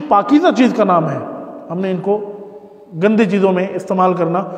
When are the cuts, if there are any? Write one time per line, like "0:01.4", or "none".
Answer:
none